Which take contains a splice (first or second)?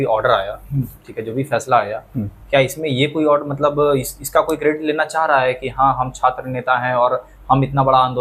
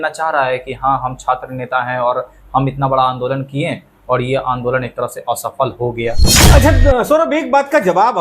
second